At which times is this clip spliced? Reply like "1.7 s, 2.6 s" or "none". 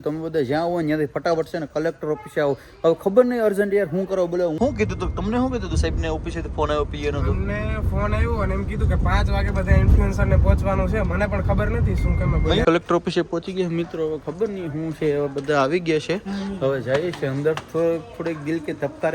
4.6 s, 12.6 s